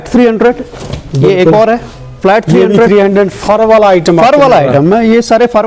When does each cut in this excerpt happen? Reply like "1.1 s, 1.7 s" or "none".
none